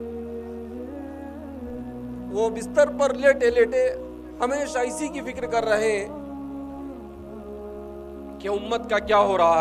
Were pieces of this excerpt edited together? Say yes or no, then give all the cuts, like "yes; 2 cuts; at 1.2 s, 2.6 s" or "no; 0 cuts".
no; 0 cuts